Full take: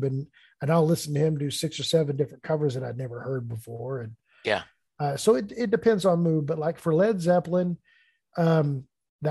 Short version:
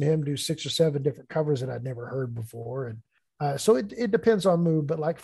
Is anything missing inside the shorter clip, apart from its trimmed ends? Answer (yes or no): yes